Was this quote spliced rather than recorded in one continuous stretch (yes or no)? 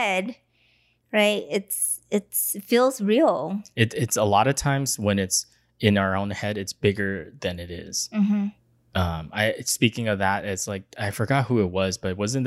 no